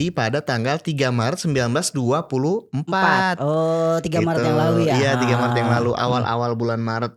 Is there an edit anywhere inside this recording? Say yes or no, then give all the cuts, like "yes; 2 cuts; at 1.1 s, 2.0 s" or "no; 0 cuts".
no; 0 cuts